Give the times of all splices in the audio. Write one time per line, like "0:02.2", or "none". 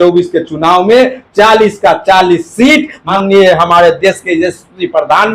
0:03.0